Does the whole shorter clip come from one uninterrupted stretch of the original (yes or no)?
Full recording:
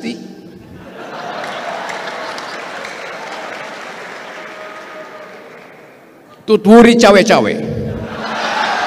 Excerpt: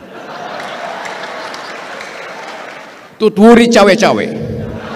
no